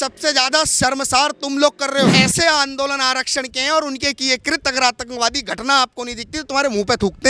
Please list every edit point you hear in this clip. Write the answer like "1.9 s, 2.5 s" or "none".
2.2 s